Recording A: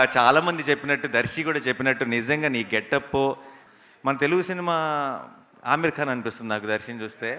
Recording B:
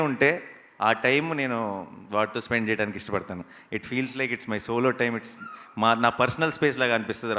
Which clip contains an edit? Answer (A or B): A